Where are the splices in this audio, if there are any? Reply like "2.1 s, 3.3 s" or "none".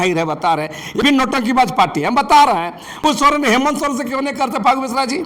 1.0 s, 3.0 s